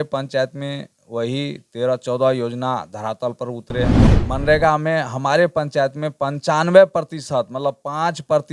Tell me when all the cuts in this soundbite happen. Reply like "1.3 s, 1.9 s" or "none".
4.1 s